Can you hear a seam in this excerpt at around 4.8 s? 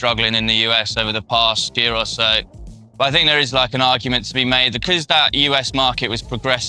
yes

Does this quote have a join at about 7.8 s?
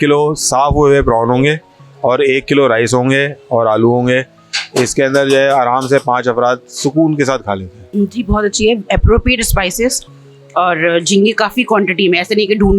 yes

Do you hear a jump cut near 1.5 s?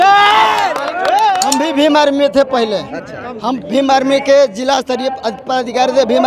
yes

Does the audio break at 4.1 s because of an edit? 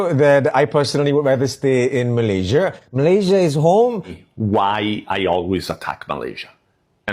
yes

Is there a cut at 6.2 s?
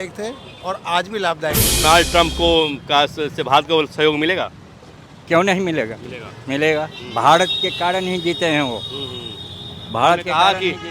no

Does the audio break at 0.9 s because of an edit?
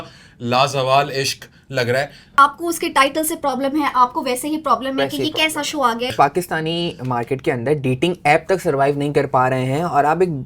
no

